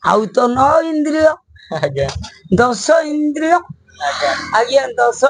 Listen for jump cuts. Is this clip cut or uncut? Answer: uncut